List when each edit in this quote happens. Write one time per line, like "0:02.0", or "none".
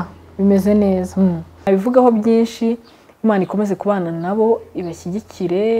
0:01.7